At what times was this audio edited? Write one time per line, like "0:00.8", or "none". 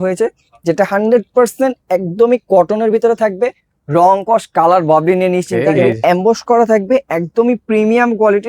0:05.6